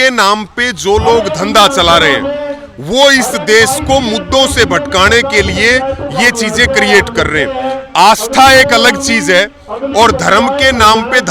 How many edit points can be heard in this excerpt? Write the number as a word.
zero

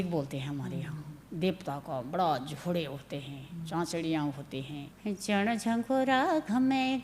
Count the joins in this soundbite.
one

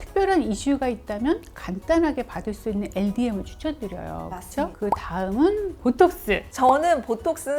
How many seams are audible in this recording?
zero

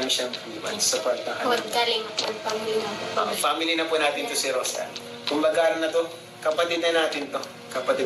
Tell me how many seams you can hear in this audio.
zero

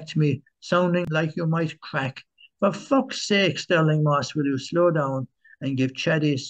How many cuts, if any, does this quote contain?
one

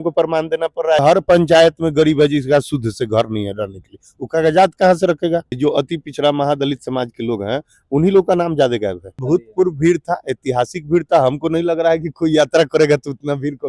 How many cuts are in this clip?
three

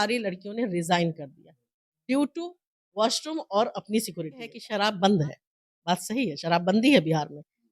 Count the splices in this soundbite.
one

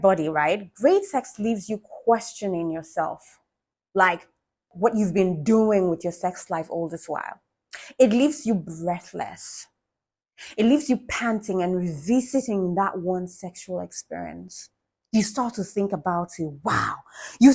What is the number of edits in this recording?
one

